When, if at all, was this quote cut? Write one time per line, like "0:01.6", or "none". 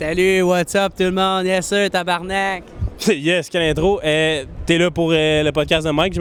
none

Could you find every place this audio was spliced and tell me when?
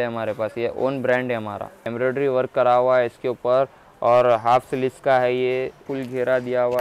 0:01.9
0:05.9

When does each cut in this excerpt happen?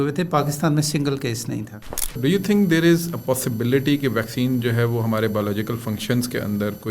0:02.1

